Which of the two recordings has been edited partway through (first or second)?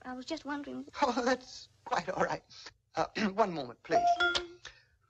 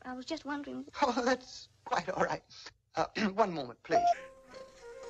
first